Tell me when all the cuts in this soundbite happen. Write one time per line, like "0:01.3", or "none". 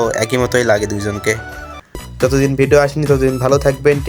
0:02.0